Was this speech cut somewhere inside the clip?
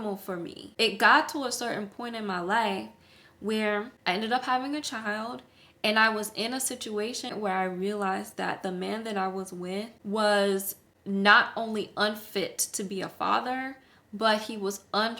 yes; 3 cuts; at 3.9 s, 7.3 s, 10.0 s

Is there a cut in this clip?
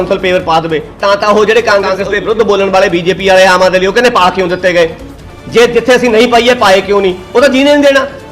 yes; 2 cuts; at 0.9 s, 2.0 s

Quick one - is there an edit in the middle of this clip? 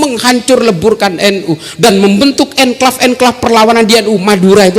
no; 0 cuts

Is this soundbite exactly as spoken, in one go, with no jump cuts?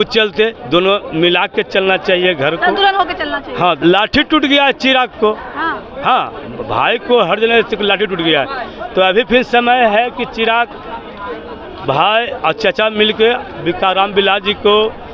no; 1 cut; at 3.8 s

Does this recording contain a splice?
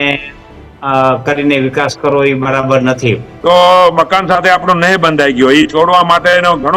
yes; 1 cut; at 3.3 s

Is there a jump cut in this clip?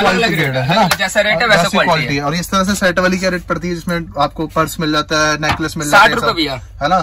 no; 0 cuts

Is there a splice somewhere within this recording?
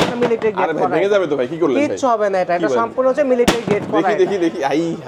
no; 0 cuts

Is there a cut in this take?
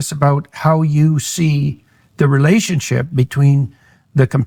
no; 0 cuts

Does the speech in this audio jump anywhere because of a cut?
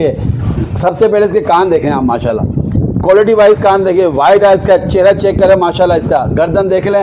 no; 0 cuts

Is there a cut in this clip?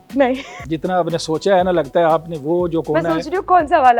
no; 0 cuts

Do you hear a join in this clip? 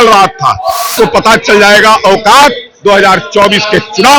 yes; 1 cut; at 0.9 s

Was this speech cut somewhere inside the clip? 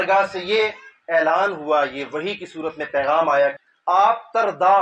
yes; 1 cut; at 3.7 s

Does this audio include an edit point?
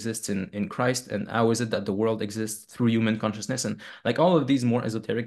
no; 0 cuts

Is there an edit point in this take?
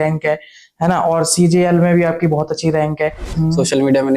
yes; 1 cut; at 3.3 s

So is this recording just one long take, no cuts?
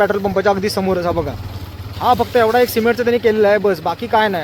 yes; 0 cuts

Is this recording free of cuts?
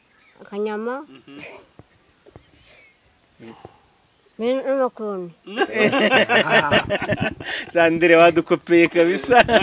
yes; 0 cuts

